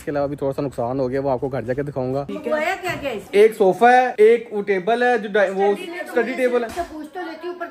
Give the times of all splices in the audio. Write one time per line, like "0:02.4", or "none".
0:02.3
0:03.2
0:06.7

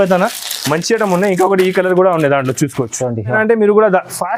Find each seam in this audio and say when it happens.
0:03.3

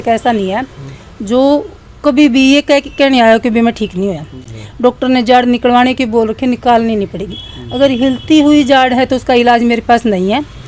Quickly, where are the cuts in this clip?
none

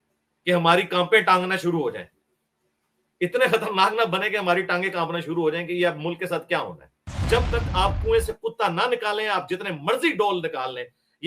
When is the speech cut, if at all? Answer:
0:07.2

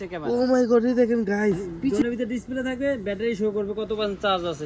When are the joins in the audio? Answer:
0:01.9

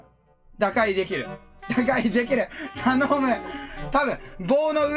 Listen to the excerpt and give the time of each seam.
none

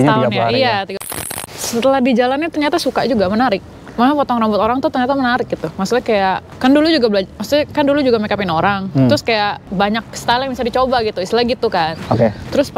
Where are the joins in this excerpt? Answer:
0:01.1
0:06.5
0:09.6

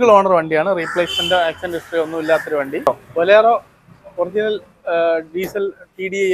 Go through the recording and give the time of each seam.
0:02.9

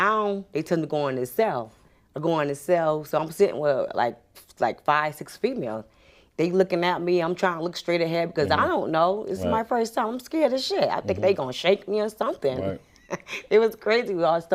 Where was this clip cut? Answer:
none

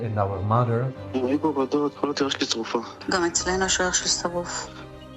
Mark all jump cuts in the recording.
none

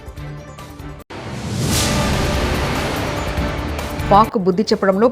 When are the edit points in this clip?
0:01.0
0:04.0

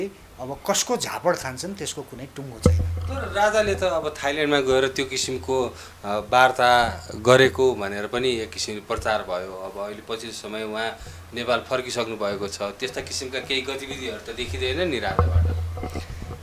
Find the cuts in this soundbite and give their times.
none

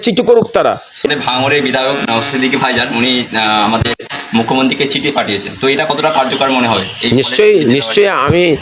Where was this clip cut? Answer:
0:01.0

